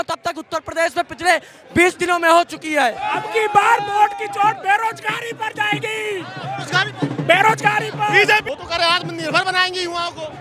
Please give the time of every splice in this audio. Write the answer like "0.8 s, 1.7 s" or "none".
3.0 s, 8.4 s

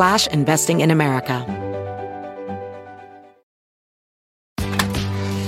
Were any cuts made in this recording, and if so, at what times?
1.4 s

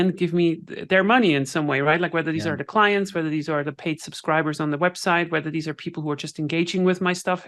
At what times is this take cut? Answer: none

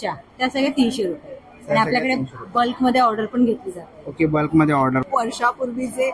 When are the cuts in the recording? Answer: 5.0 s

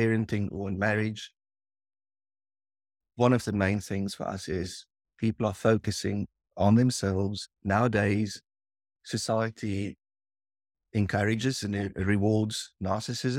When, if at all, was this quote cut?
none

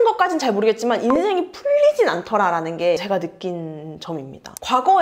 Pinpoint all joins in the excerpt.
none

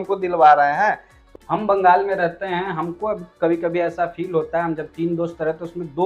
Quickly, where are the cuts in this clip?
1.1 s

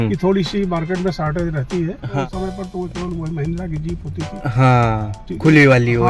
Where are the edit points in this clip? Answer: 2.2 s

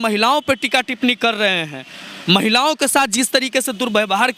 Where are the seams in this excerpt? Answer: none

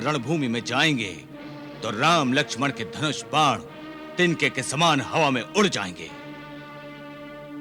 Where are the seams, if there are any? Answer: none

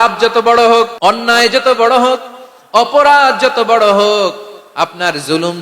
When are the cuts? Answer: 0.9 s

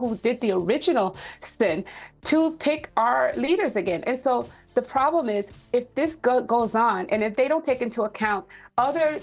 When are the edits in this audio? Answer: none

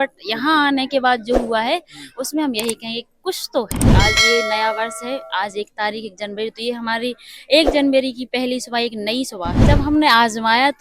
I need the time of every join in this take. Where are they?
3.9 s, 9.6 s

